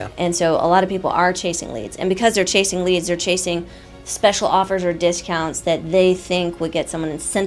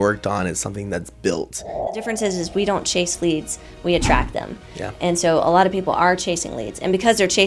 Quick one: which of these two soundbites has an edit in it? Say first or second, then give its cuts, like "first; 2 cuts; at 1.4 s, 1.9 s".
second; 1 cut; at 2.0 s